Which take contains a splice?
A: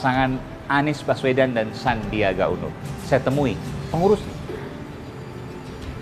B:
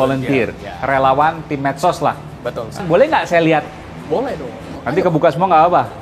B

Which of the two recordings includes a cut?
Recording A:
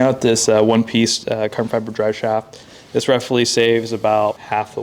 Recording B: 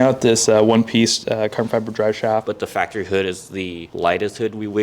B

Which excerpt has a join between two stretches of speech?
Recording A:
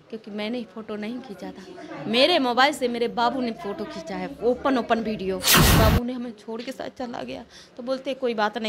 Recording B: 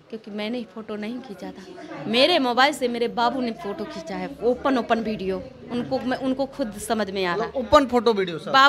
A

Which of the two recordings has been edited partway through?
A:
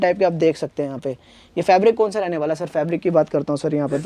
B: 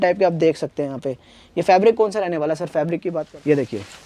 B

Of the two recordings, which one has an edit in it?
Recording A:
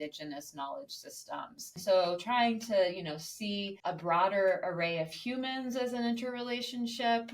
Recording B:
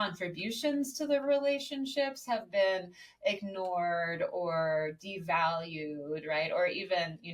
A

